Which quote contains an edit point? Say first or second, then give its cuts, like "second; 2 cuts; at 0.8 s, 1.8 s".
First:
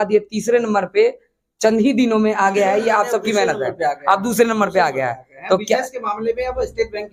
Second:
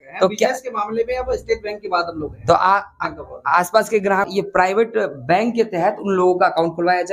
second; 1 cut; at 4.2 s